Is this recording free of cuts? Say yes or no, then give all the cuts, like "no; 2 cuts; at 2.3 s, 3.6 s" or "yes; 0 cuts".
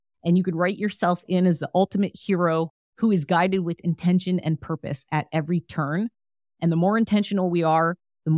yes; 0 cuts